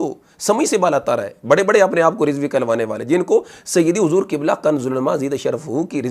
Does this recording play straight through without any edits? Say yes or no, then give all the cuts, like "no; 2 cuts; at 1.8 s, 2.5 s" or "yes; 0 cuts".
yes; 0 cuts